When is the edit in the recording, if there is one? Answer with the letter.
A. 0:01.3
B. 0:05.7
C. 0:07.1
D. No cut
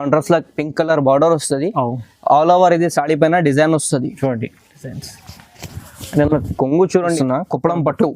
C